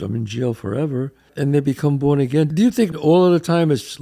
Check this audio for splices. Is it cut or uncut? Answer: cut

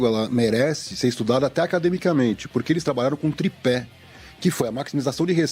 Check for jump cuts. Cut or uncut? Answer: uncut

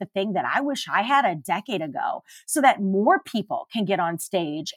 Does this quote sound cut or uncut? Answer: uncut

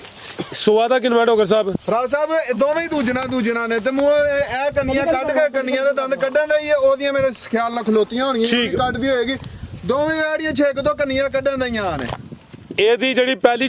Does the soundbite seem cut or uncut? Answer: uncut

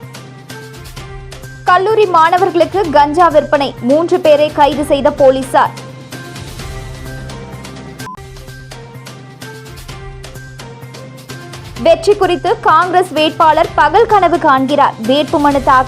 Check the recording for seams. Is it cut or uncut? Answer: cut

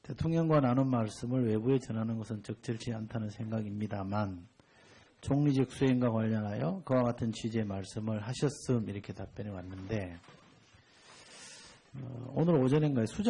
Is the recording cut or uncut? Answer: uncut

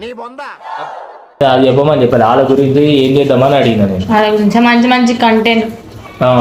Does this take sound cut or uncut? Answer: uncut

